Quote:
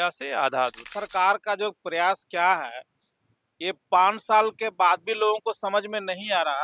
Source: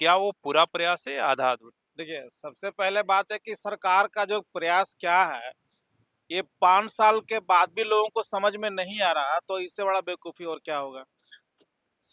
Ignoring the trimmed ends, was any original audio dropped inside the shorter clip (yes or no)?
yes